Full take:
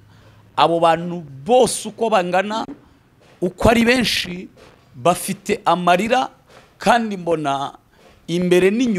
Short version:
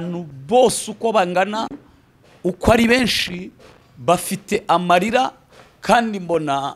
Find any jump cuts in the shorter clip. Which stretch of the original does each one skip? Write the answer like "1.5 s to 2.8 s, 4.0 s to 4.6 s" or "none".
none